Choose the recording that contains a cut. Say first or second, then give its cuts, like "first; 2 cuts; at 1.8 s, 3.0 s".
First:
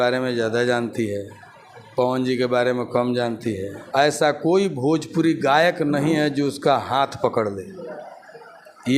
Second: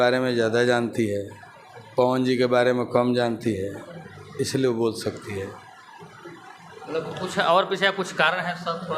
first; 1 cut; at 3.7 s